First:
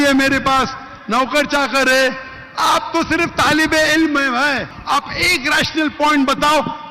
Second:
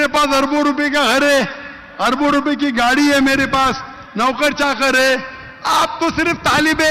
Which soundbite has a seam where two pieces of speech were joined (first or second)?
first